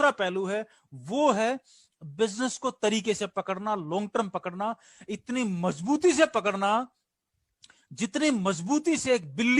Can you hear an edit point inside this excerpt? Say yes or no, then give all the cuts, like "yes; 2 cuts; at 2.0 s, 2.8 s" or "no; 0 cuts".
no; 0 cuts